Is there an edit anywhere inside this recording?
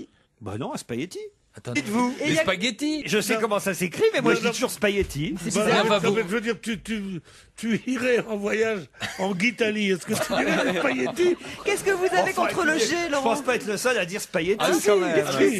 no; 0 cuts

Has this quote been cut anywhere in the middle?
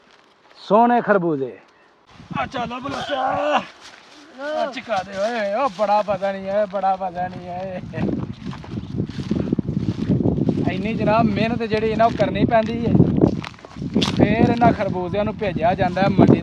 yes; 1 cut; at 2.2 s

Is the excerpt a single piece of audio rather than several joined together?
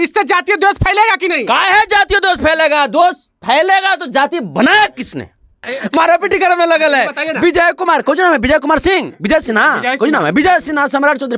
no; 1 cut; at 5.7 s

